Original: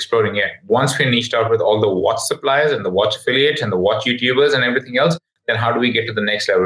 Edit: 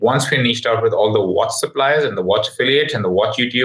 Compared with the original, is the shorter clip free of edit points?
yes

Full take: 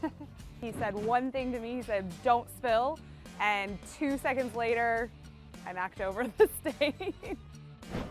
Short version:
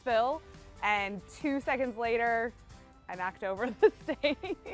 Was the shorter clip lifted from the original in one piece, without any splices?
yes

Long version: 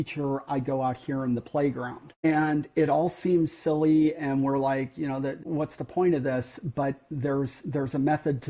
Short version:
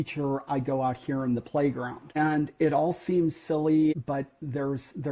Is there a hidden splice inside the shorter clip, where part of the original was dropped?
yes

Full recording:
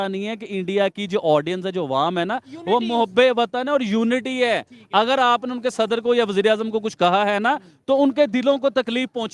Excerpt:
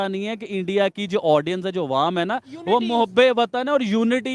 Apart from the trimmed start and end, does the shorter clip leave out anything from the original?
no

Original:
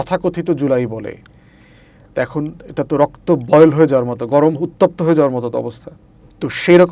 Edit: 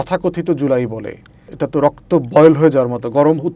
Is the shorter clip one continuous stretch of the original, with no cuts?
no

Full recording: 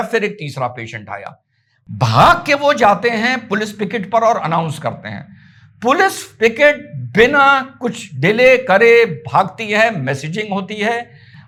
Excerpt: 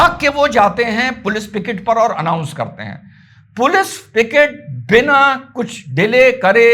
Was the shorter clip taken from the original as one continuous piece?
yes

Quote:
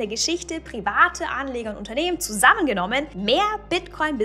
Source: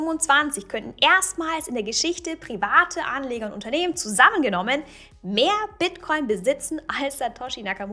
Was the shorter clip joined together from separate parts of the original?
yes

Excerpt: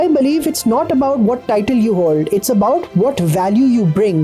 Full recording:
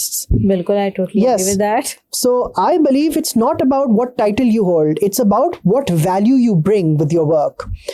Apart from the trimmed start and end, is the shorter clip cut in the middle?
no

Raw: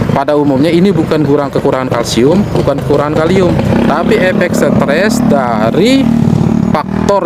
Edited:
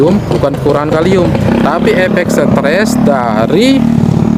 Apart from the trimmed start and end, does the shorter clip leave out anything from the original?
no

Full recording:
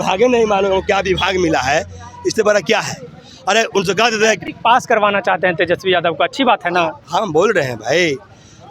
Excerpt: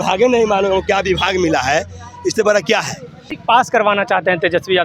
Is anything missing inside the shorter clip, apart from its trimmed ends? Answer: yes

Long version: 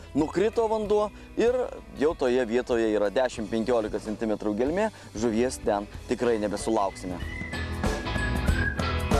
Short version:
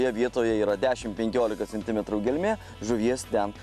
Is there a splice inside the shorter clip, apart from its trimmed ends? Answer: no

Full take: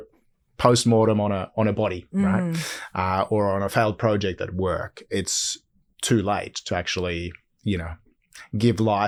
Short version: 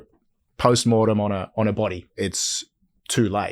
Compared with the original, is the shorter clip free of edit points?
no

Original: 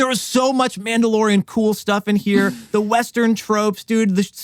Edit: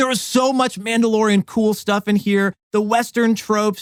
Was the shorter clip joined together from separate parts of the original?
no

